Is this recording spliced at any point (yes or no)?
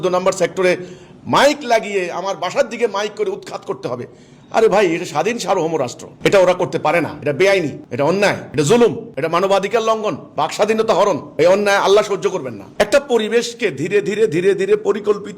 yes